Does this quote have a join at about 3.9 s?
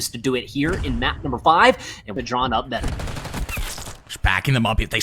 no; 1 cut; at 2.1 s

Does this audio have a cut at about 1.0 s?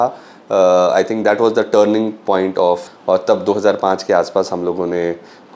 no; 1 cut; at 3.0 s

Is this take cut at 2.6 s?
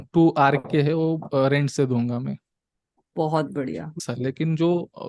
no; 1 cut; at 4.0 s

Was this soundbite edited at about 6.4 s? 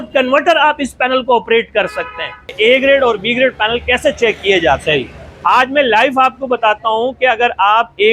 no; 1 cut; at 2.5 s

